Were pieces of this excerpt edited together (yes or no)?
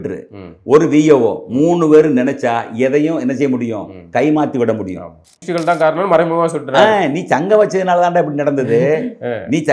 yes